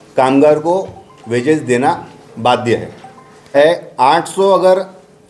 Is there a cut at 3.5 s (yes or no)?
yes